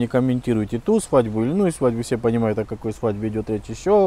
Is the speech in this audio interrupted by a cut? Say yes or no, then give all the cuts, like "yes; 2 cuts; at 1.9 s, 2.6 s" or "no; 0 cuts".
no; 0 cuts